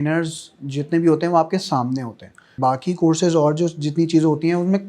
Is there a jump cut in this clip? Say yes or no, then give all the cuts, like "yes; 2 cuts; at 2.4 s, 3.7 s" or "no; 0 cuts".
yes; 1 cut; at 2.5 s